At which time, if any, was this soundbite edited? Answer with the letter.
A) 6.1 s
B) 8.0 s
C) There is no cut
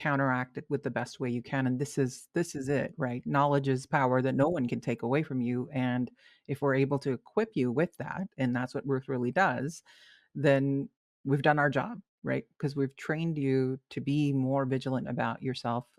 C